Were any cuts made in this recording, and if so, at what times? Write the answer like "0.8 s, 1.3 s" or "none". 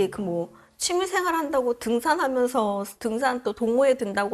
none